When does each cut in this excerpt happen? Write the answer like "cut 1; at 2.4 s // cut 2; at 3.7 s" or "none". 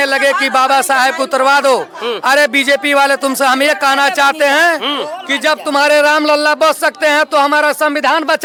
none